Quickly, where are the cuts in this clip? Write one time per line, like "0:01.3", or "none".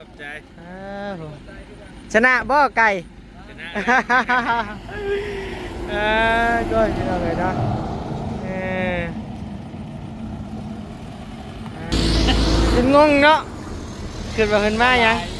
0:11.9